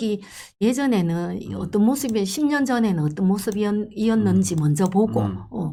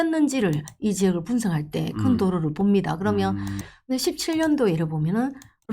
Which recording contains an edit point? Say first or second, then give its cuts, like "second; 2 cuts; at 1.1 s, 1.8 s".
second; 1 cut; at 3.7 s